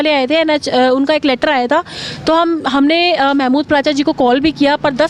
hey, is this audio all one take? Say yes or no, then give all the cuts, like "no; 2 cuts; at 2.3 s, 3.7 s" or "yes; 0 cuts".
yes; 0 cuts